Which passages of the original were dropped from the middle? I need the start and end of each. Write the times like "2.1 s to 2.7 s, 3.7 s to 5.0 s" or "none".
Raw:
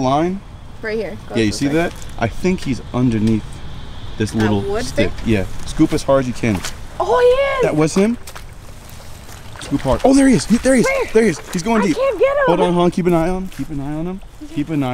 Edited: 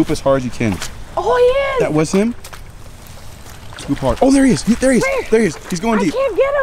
none